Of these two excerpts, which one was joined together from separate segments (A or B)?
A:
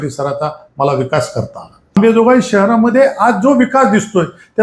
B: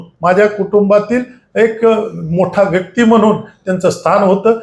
A